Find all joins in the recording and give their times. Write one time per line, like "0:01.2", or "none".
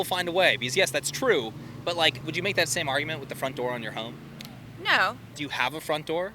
0:02.2
0:05.3